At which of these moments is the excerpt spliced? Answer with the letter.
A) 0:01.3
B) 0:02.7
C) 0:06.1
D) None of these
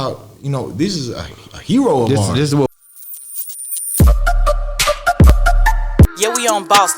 B